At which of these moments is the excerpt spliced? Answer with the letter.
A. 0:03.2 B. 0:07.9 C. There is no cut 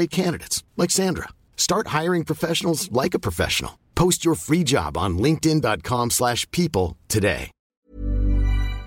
B